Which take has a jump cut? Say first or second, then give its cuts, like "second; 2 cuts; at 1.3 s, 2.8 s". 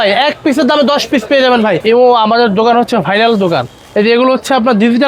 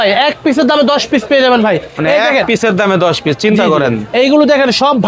first; 1 cut; at 1.8 s